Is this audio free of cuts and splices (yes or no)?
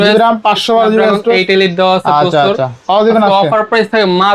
yes